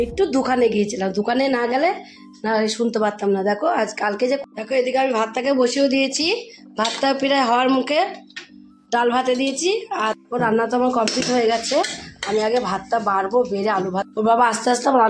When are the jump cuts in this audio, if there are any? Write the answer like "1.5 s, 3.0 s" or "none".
4.4 s, 10.2 s, 14.1 s